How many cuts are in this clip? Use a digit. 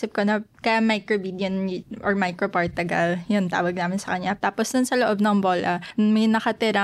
2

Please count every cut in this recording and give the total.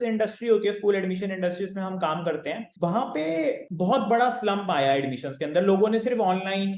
2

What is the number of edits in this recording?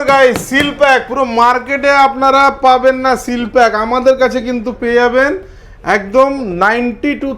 0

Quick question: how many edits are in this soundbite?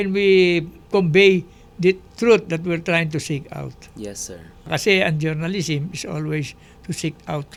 0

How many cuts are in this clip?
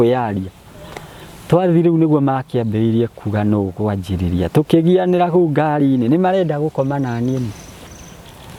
0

